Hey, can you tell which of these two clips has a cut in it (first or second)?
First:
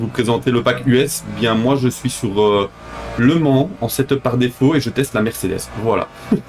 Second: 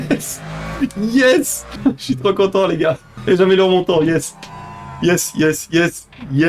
second